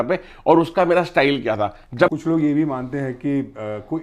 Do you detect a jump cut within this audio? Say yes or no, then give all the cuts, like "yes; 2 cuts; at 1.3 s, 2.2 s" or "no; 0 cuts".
yes; 1 cut; at 2.1 s